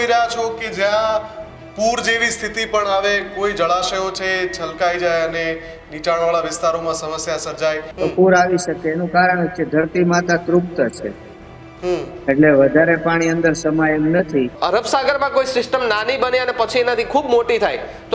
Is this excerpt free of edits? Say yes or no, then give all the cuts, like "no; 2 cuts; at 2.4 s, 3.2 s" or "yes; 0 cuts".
no; 2 cuts; at 7.9 s, 14.6 s